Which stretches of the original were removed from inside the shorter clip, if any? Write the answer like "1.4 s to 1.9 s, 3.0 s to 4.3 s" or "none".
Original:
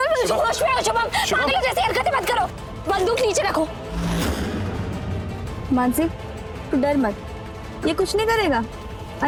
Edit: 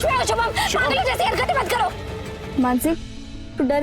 2.7 s to 5.2 s